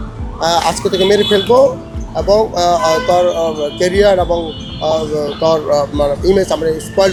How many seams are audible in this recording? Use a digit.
0